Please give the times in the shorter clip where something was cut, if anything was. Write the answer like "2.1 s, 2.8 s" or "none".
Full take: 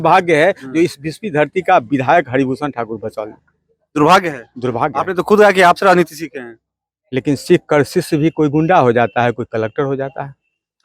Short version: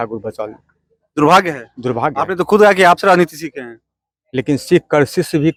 none